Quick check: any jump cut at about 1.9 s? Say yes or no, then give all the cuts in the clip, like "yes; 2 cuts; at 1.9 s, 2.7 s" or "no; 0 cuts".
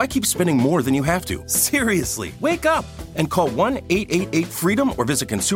yes; 1 cut; at 1.9 s